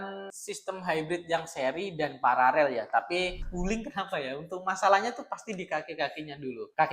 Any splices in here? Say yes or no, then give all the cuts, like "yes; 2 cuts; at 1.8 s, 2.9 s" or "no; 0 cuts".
yes; 1 cut; at 3.3 s